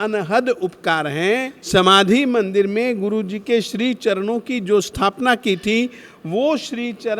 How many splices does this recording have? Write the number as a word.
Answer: one